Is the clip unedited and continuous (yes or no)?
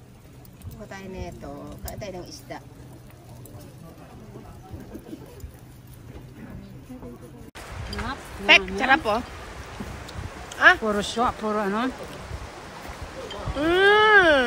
no